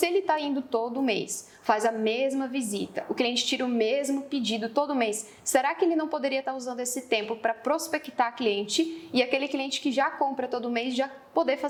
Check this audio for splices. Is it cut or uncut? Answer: uncut